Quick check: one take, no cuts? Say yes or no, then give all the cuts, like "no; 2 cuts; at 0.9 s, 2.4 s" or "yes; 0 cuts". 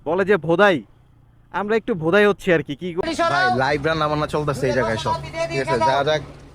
no; 1 cut; at 3.0 s